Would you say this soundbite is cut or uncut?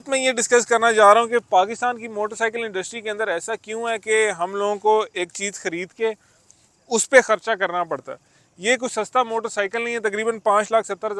uncut